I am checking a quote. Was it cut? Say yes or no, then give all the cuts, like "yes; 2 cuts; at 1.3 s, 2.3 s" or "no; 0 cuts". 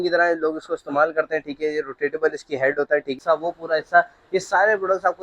yes; 1 cut; at 3.2 s